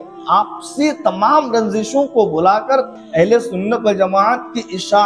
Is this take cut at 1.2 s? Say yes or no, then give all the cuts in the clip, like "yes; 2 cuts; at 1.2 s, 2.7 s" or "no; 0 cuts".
no; 1 cut; at 2.9 s